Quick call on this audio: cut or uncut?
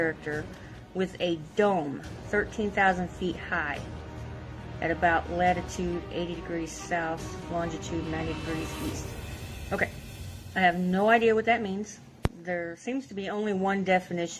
cut